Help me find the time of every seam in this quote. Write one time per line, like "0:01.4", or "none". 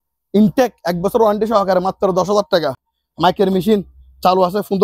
none